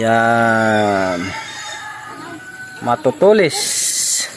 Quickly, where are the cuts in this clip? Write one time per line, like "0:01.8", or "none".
none